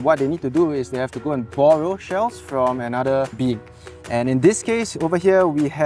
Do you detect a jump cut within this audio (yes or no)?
yes